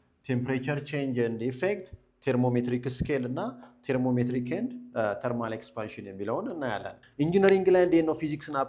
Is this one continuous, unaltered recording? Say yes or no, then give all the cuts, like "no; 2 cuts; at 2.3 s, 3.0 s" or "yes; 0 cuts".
no; 1 cut; at 7.0 s